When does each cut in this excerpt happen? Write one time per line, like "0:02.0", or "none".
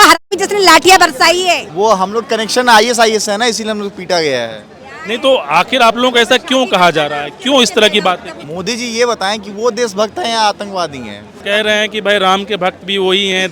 0:01.7
0:08.4
0:11.3